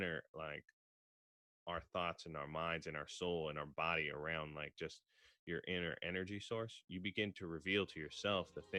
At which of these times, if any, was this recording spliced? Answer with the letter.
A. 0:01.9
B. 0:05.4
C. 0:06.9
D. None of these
D